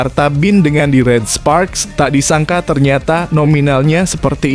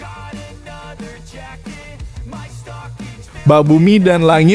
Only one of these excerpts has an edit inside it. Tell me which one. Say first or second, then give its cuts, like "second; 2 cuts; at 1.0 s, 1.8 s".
second; 1 cut; at 3.4 s